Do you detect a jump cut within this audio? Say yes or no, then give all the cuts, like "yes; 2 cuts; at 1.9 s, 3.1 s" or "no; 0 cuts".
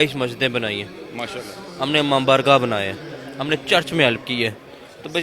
no; 0 cuts